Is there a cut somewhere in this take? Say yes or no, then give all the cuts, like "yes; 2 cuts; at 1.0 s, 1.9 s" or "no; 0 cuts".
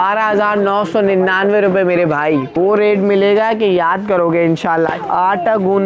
yes; 2 cuts; at 2.5 s, 4.9 s